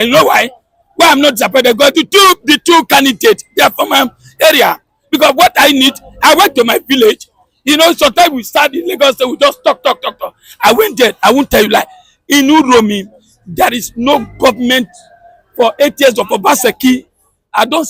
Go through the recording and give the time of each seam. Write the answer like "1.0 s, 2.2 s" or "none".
none